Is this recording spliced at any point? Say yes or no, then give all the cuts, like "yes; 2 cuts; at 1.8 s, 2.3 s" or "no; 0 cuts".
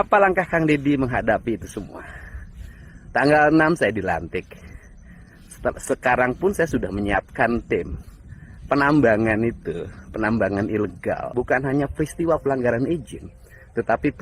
yes; 1 cut; at 11.3 s